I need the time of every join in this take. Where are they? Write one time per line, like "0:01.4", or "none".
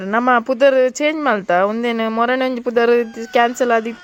none